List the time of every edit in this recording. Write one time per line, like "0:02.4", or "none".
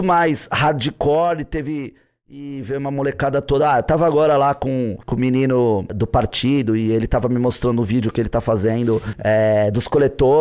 0:02.1